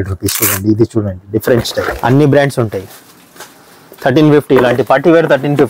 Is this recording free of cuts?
no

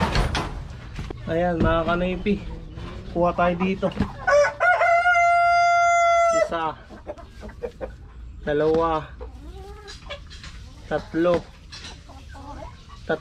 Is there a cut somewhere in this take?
yes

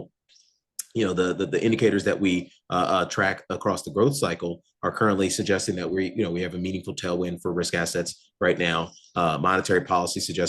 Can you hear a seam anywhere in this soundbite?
no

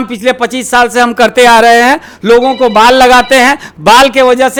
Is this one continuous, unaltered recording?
yes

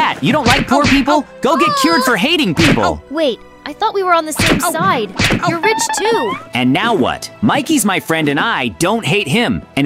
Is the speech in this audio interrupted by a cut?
no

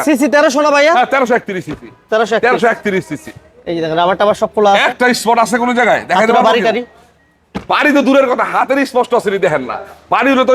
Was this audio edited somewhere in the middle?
no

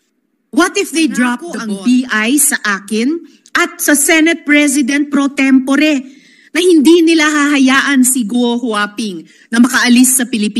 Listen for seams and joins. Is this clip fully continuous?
no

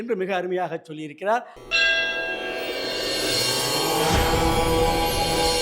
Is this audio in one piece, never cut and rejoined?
no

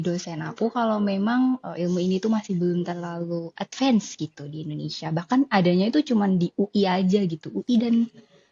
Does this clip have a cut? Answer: no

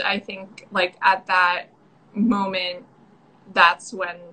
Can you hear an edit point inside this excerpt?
no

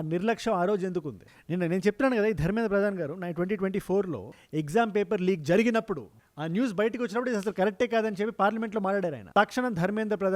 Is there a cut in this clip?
yes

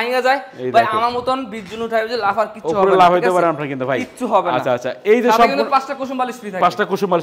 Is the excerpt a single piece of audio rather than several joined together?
yes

